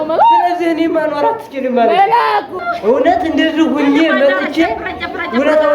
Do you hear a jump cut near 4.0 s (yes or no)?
no